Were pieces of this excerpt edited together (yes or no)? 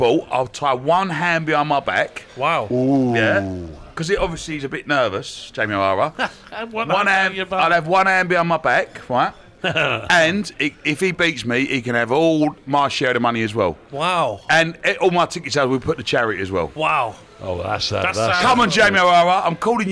yes